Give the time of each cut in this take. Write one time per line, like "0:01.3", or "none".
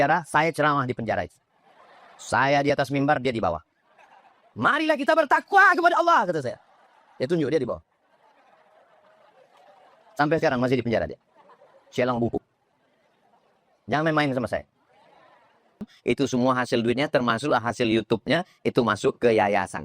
0:15.9